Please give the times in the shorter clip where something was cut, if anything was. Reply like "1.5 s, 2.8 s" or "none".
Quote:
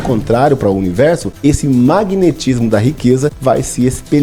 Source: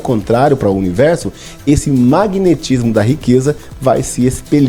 1.3 s, 3.4 s